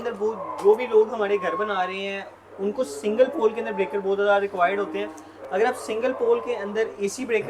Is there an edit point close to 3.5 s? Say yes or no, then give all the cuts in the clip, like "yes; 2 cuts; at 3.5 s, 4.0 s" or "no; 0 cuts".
no; 0 cuts